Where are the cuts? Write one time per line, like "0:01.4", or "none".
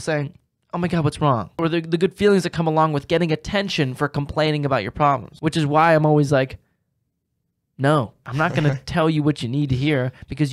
0:01.5
0:05.3
0:08.2